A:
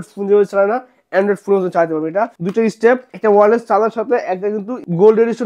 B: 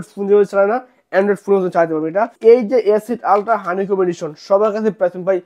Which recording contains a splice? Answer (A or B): A